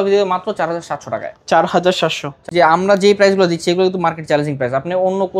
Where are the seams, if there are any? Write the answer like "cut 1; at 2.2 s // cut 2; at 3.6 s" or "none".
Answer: cut 1; at 2.4 s